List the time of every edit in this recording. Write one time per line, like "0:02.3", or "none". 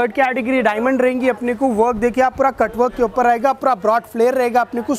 none